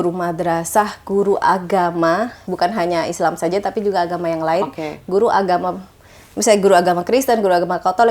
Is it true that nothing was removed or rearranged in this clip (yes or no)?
no